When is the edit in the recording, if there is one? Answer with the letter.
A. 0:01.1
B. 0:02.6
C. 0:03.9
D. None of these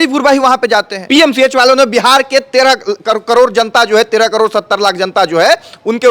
A